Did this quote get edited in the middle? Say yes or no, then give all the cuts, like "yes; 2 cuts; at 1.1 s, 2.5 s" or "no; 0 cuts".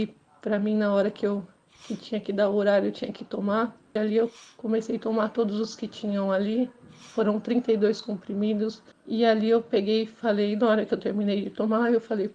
yes; 2 cuts; at 4.0 s, 8.9 s